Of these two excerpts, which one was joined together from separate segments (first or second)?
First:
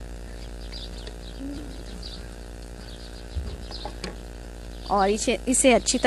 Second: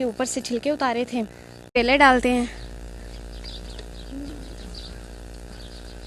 second